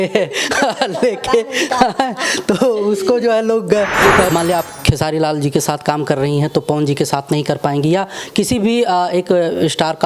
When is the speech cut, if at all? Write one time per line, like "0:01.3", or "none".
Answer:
0:04.3